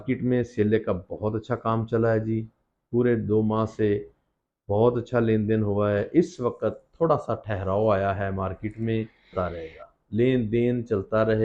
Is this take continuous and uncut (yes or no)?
no